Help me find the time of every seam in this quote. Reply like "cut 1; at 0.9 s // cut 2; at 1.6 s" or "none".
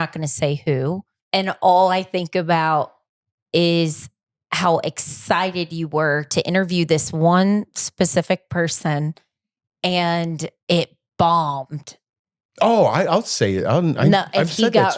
cut 1; at 1.1 s